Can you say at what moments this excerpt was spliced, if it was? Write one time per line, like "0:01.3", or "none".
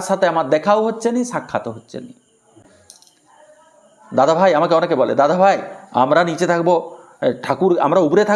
none

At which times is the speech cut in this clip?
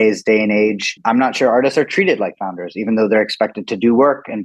0:00.9

